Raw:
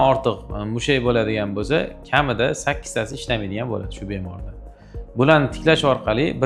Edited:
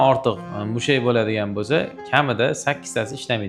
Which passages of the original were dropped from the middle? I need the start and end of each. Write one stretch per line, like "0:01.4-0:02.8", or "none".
none